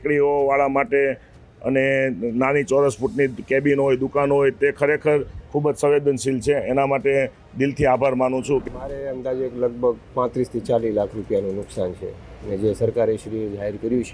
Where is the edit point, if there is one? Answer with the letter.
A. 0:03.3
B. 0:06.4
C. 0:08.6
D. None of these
C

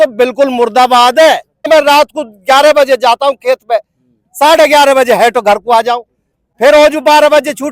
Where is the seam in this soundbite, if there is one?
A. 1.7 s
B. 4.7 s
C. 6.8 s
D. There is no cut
A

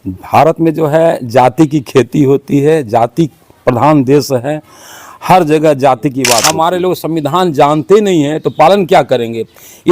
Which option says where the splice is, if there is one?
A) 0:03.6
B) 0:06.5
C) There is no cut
B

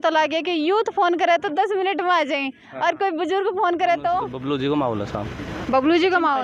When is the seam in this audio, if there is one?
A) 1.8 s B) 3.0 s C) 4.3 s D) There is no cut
C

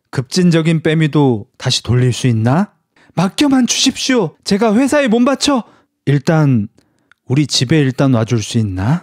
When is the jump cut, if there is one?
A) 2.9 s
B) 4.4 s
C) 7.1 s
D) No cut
D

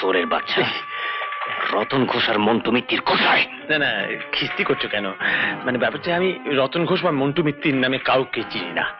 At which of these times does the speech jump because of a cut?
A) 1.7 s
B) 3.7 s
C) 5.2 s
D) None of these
D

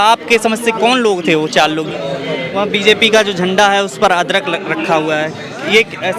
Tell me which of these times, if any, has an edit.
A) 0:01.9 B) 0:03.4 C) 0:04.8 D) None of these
A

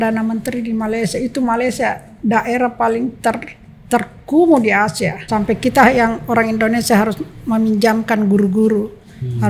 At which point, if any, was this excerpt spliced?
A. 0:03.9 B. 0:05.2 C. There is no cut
B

